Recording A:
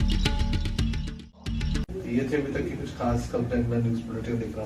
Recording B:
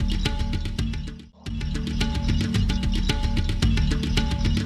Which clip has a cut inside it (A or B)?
B